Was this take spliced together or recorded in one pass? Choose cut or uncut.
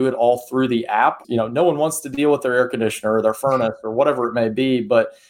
cut